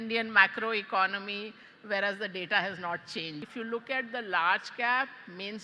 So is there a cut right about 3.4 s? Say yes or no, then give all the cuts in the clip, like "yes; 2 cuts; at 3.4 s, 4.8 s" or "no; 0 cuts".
yes; 1 cut; at 3.4 s